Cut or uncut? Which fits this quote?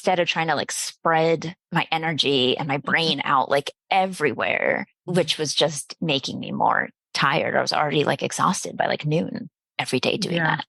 cut